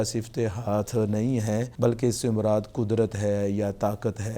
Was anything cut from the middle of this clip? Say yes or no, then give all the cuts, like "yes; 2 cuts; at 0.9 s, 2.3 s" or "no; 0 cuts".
yes; 1 cut; at 1.7 s